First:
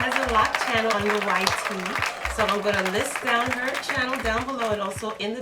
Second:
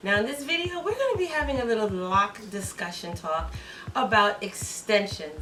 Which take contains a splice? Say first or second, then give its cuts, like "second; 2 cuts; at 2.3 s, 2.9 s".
first; 1 cut; at 0.9 s